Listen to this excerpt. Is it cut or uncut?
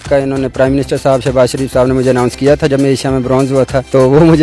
uncut